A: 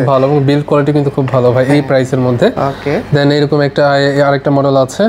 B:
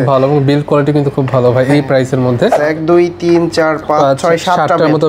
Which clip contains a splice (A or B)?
B